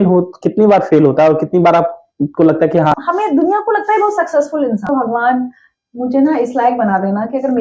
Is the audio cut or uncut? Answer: cut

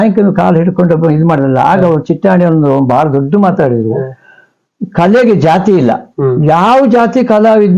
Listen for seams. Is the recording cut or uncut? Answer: uncut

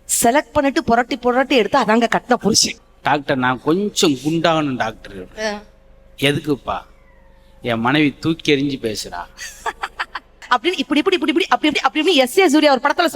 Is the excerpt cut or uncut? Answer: cut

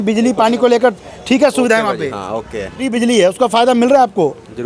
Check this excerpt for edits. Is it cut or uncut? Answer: cut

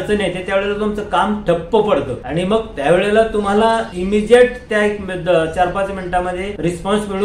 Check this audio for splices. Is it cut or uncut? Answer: uncut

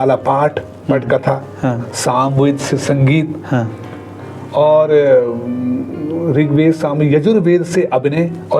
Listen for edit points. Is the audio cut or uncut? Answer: uncut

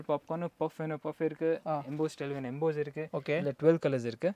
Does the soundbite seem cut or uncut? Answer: uncut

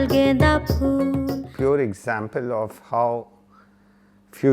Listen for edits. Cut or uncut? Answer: cut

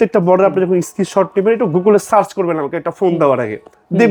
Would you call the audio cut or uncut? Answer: uncut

